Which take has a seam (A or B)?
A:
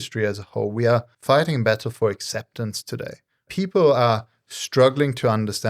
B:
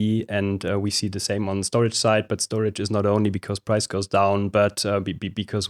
A